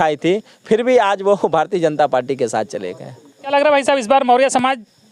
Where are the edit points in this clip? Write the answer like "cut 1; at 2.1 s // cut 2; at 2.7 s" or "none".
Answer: none